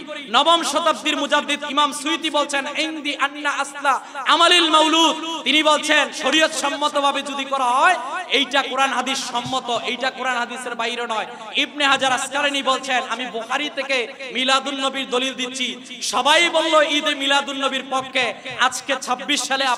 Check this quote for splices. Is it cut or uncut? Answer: uncut